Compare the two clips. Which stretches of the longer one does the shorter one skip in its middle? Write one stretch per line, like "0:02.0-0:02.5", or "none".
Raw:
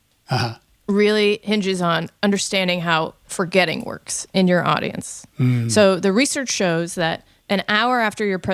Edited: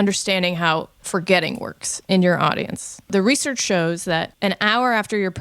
0:05.3-0:06.0
0:07.2-0:07.4